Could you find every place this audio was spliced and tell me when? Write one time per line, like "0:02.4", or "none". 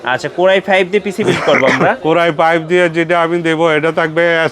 0:02.0